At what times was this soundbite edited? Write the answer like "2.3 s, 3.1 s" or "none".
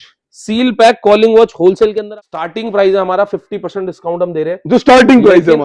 2.0 s

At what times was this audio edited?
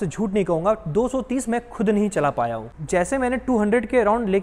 none

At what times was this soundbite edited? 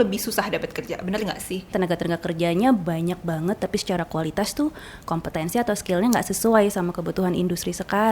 1.7 s

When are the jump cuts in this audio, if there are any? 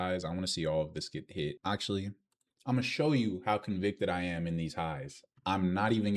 1.6 s

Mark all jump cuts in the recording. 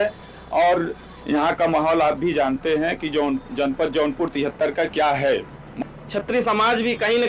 5.7 s

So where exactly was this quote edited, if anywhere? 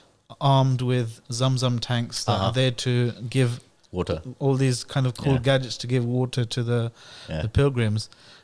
none

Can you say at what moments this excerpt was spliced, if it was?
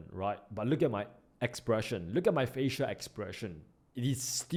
none

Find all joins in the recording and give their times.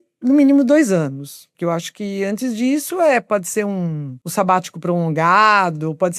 1.5 s

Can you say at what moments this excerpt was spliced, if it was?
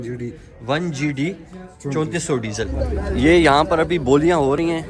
2.7 s

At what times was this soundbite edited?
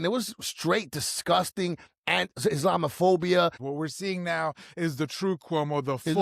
3.6 s

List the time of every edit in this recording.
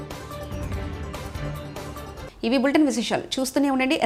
none

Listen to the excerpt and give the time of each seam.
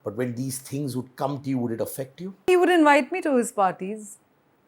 2.5 s

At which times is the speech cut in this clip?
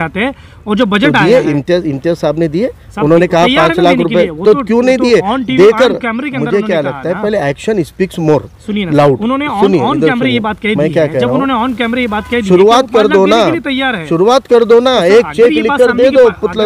none

